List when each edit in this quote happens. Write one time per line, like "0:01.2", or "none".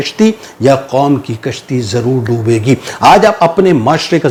none